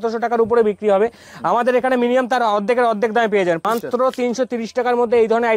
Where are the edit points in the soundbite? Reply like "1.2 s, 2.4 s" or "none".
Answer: 3.6 s